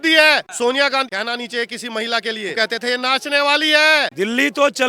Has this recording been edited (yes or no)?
yes